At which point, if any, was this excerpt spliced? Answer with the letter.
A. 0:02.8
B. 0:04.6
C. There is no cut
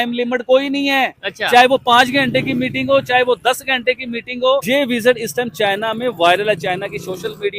B